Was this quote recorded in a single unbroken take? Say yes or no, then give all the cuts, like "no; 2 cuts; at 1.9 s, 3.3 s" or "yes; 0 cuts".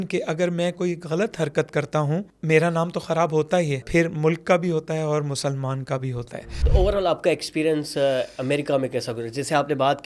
no; 3 cuts; at 2.3 s, 3.8 s, 6.4 s